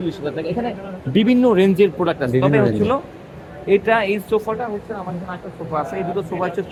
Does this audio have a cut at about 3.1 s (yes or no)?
no